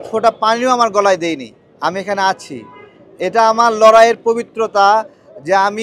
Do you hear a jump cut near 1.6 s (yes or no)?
no